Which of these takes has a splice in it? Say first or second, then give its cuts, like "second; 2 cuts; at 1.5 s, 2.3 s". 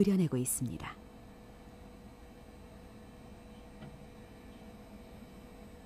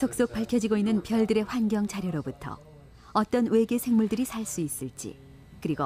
second; 1 cut; at 3.4 s